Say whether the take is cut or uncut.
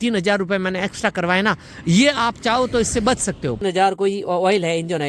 cut